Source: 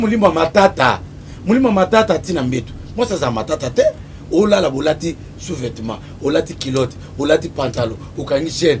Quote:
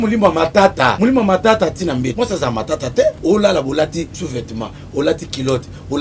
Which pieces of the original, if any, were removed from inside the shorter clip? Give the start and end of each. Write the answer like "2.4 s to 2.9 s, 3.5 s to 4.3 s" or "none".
0.9 s to 1.4 s, 2.6 s to 2.9 s, 4.0 s to 4.3 s, 5.3 s to 5.5 s